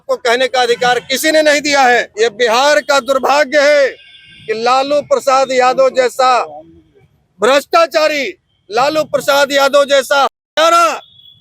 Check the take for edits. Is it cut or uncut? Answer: cut